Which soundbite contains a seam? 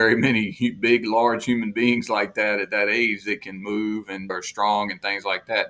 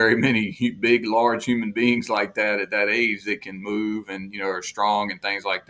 first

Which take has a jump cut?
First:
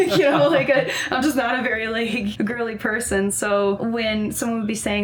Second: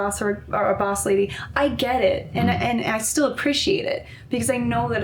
first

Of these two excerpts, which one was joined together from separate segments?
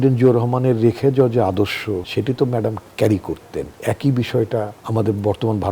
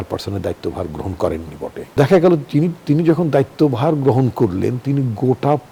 first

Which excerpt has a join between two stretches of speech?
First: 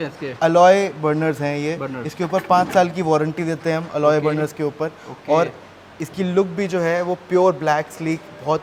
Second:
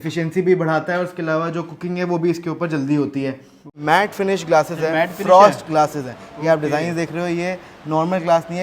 second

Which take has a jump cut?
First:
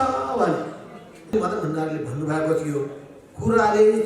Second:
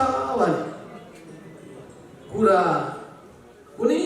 first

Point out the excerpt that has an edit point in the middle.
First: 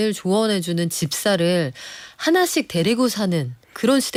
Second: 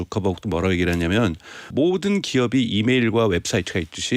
second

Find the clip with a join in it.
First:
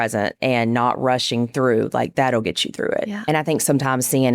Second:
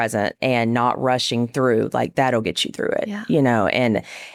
first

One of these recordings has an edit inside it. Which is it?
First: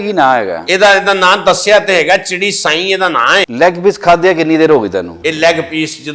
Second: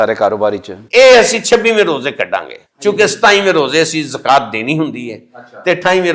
first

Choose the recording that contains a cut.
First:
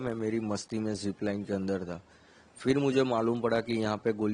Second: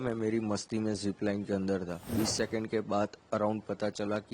second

